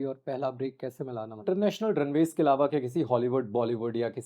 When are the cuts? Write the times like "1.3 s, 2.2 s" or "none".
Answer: 1.4 s